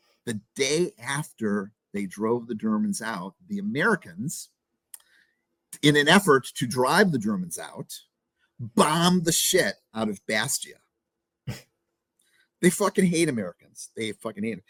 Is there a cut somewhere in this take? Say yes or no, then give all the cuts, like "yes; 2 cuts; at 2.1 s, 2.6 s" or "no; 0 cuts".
no; 0 cuts